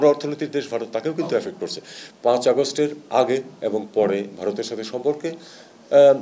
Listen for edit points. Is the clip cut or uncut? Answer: cut